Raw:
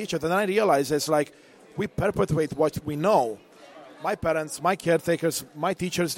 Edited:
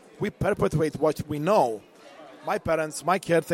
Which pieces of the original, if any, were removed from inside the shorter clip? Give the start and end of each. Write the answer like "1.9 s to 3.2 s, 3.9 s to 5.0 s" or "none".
none